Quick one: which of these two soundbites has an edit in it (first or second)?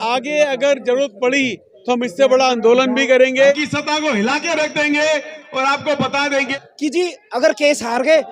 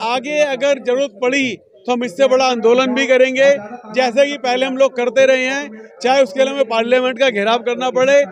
first